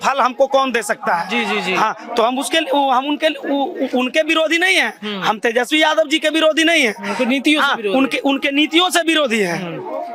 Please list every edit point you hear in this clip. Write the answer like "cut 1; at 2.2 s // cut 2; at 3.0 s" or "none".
none

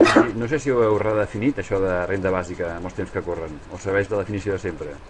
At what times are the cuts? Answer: cut 1; at 2.3 s

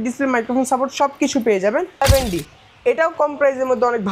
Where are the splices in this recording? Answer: cut 1; at 2.0 s

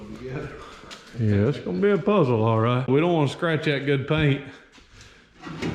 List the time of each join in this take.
cut 1; at 2.9 s

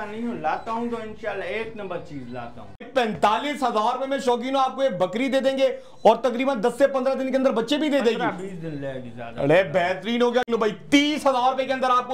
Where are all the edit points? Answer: cut 1; at 2.8 s // cut 2; at 10.5 s

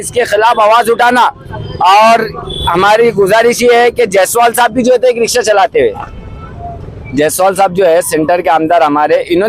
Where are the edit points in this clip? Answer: none

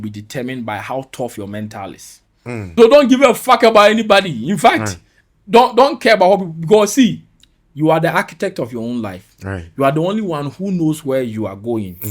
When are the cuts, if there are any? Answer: cut 1; at 2.7 s

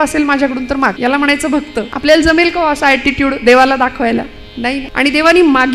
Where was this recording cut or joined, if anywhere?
cut 1; at 1.0 s // cut 2; at 1.9 s // cut 3; at 4.8 s

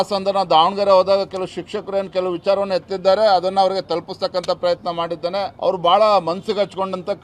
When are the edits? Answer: cut 1; at 5.5 s

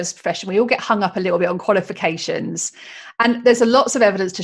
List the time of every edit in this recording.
none

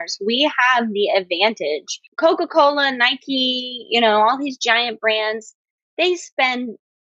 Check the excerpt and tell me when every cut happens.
cut 1; at 2.0 s

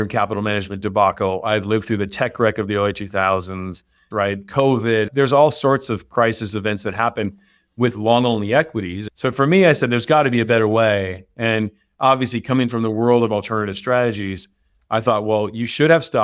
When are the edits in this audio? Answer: cut 1; at 4.0 s // cut 2; at 5.1 s // cut 3; at 9.0 s

